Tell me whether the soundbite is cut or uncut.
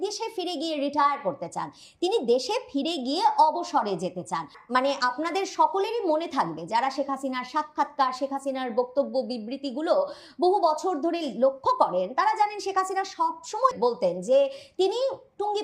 cut